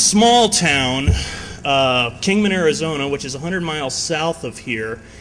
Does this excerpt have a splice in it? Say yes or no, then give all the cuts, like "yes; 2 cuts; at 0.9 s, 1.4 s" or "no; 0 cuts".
no; 0 cuts